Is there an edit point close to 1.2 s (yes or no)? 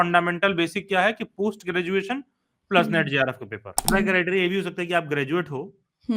no